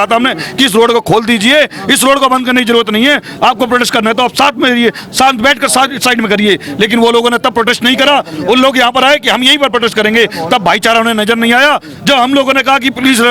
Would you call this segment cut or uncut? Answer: uncut